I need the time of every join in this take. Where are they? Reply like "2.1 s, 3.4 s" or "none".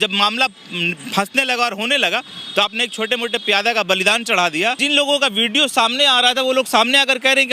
4.8 s